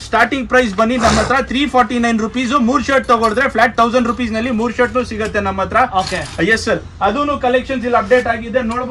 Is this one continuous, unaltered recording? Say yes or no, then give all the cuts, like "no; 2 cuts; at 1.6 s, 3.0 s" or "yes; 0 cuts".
yes; 0 cuts